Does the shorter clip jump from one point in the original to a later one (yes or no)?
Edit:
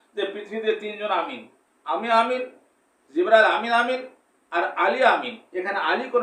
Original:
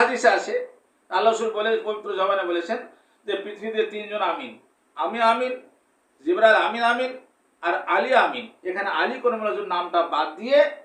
no